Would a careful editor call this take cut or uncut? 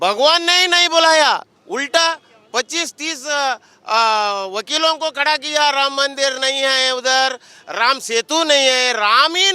cut